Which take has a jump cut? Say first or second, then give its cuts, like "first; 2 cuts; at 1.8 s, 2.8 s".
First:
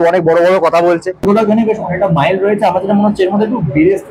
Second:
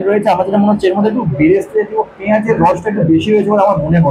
first; 1 cut; at 1.3 s